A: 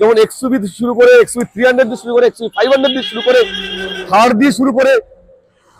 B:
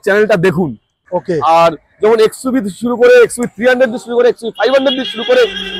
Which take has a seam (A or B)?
B